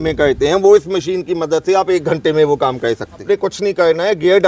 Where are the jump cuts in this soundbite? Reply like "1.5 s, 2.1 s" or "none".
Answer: 3.2 s

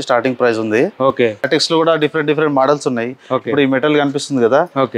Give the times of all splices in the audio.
1.5 s

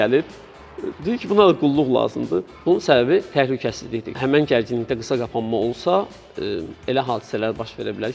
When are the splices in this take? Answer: 2.5 s, 4.2 s

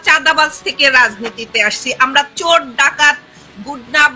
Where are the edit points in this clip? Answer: none

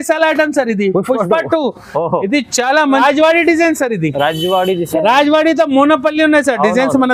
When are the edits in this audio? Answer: 3.0 s

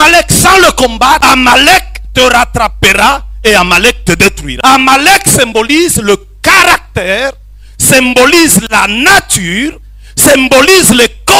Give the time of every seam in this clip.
1.2 s, 4.5 s

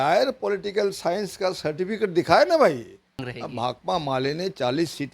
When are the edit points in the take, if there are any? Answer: 3.3 s

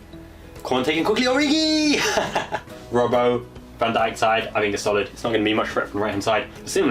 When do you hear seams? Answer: 2.7 s

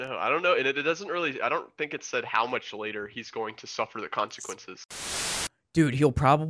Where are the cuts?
5.0 s

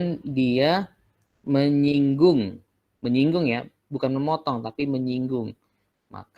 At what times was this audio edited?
none

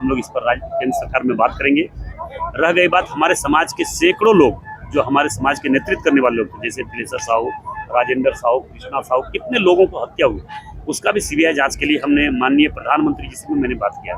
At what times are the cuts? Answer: none

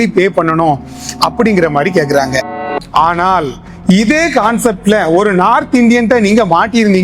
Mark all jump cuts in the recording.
2.6 s

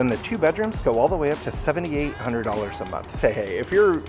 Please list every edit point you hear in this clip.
3.2 s

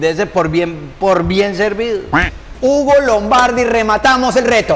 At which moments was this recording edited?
none

